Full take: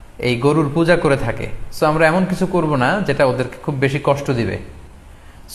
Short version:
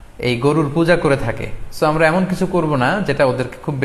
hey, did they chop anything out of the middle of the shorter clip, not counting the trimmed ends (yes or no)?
no